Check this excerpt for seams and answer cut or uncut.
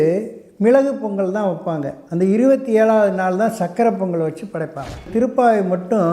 cut